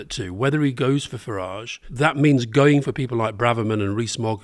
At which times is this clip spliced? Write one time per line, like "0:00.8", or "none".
0:01.9